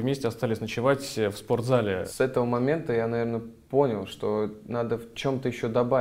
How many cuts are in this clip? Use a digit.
1